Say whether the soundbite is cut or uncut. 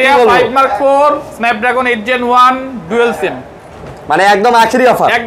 uncut